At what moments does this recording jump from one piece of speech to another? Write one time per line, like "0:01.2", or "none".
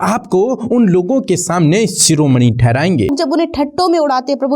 0:03.1